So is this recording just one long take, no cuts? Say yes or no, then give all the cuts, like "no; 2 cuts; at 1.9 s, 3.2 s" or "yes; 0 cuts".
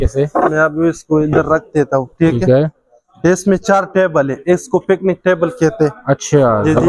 yes; 0 cuts